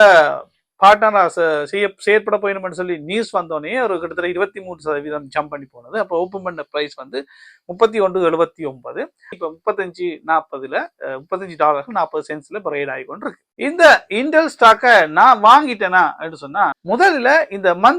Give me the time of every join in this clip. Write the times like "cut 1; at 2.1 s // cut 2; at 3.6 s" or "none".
cut 1; at 9.3 s // cut 2; at 16.8 s